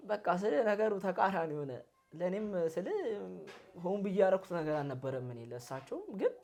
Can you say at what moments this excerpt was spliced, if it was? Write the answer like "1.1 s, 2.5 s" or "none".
none